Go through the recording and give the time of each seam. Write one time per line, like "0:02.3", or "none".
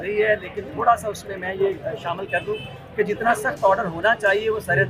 none